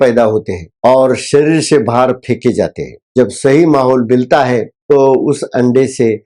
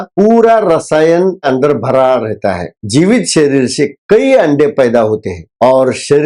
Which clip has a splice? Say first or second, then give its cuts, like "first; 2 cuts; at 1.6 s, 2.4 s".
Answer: second; 2 cuts; at 1.4 s, 2.8 s